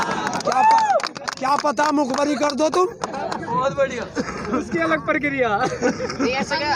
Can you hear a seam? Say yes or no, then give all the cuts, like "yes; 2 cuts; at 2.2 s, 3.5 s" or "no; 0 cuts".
no; 0 cuts